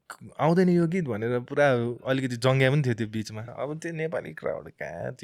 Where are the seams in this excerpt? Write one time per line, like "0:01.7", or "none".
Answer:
0:03.4